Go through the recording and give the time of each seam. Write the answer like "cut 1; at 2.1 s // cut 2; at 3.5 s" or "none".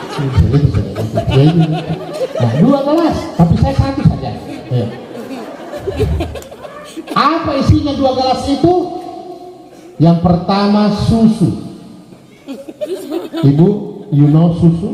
none